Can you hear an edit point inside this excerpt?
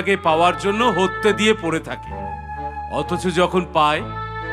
no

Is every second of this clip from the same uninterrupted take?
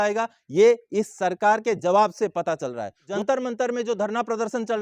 no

